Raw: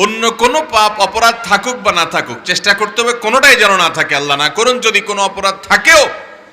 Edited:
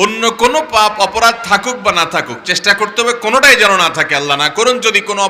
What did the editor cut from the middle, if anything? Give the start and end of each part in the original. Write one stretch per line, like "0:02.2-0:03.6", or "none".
none